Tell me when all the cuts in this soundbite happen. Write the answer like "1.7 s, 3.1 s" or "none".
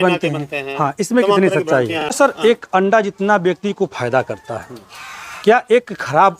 2.2 s